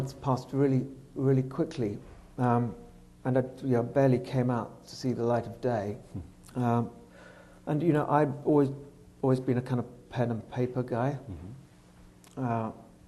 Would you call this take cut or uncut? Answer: uncut